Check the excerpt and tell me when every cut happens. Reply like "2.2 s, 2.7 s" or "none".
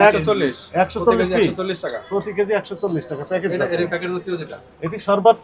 none